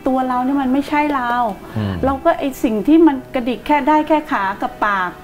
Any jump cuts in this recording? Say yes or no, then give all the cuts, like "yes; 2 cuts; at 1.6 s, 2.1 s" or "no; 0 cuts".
no; 0 cuts